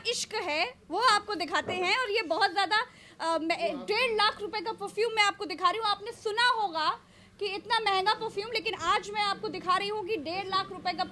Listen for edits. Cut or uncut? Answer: uncut